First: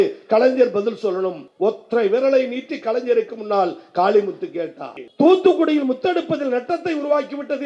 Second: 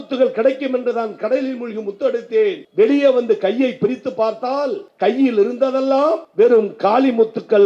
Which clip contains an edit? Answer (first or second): first